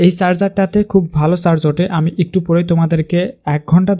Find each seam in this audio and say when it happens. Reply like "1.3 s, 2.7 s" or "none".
none